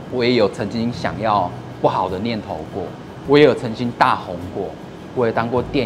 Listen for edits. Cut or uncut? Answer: uncut